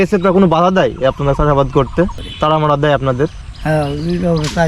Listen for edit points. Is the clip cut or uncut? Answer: cut